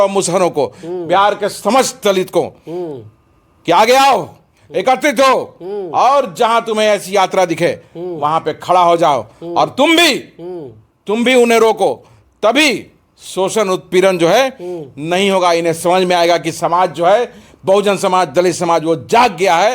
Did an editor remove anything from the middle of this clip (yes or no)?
no